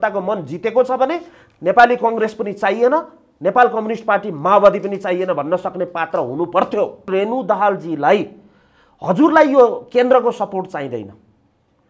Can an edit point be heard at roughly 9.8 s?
no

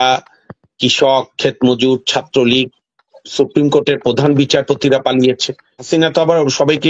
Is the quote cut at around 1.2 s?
no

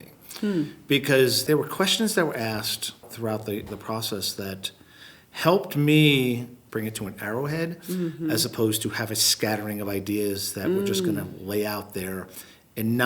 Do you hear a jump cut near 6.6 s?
yes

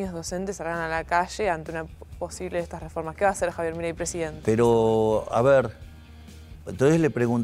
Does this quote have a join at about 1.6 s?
no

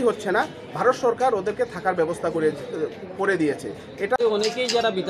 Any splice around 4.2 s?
yes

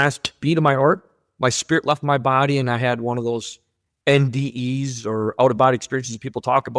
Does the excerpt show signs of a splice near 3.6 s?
no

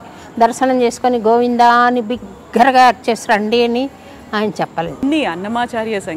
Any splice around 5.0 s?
yes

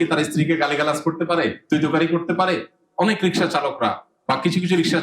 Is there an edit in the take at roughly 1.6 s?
yes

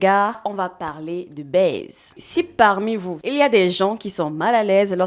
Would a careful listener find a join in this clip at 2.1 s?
yes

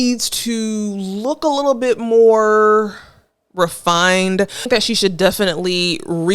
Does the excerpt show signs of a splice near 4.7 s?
yes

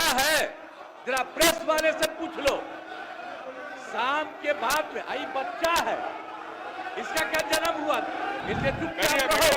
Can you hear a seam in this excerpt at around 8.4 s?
yes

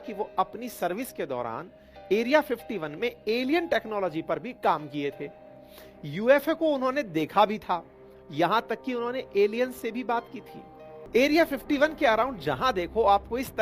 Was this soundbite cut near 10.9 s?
yes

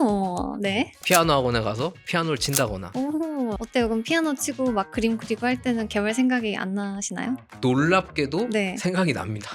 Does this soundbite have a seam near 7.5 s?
yes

